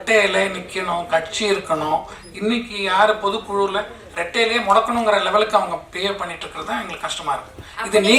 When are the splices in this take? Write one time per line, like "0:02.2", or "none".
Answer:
0:04.0